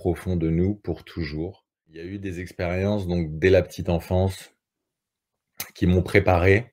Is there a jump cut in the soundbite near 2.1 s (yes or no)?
yes